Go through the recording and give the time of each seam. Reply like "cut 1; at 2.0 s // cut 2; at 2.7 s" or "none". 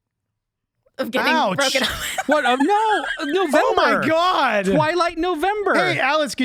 none